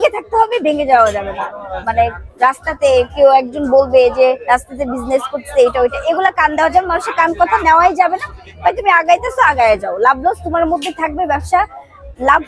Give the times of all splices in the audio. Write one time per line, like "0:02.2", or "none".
none